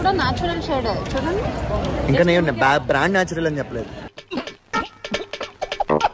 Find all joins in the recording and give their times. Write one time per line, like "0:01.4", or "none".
none